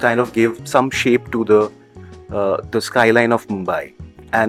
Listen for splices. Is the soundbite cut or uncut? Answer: uncut